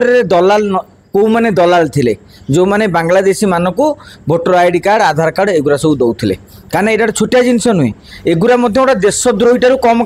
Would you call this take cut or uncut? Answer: uncut